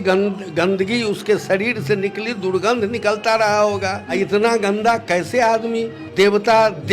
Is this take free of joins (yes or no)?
no